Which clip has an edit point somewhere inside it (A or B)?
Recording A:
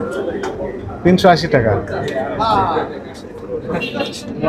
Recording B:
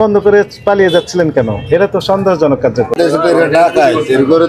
B